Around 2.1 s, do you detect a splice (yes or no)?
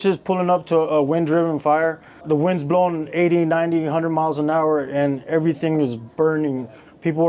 yes